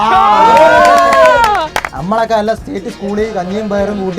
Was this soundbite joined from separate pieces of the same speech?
yes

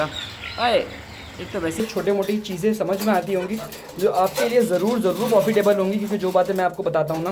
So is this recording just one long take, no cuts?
no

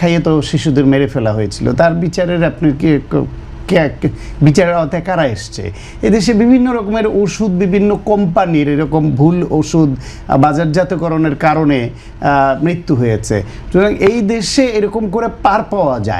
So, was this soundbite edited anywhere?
no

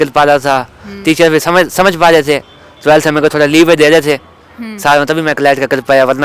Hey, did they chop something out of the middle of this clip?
no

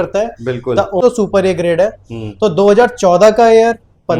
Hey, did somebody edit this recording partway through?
yes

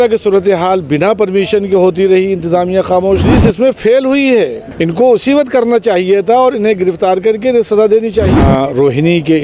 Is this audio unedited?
no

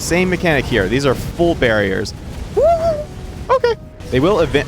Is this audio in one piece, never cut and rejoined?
no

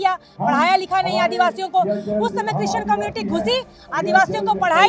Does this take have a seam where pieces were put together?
no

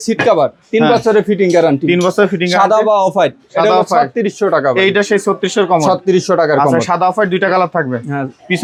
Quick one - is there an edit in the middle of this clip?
no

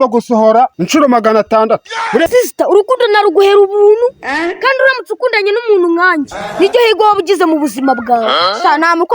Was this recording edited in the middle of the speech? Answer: yes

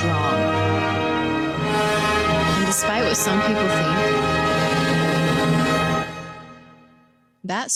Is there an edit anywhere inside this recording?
no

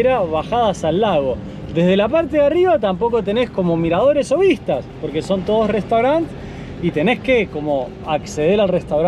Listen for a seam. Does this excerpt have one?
no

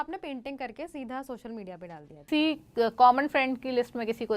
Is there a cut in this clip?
yes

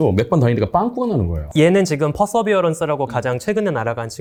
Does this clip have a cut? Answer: no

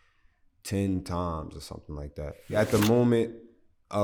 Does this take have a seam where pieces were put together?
yes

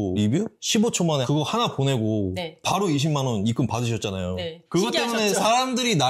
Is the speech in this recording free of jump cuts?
yes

